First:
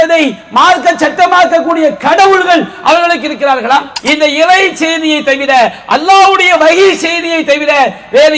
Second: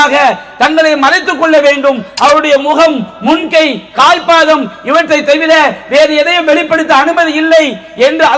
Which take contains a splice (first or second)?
first